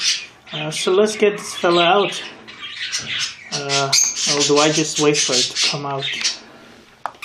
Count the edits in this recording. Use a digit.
1